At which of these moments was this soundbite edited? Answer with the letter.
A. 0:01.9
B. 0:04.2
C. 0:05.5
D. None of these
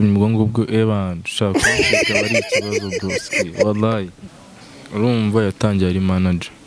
B